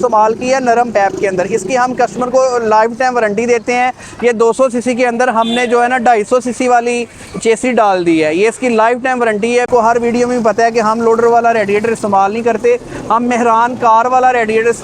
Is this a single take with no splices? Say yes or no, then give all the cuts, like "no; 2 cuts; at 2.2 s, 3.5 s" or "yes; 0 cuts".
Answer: no; 1 cut; at 9.7 s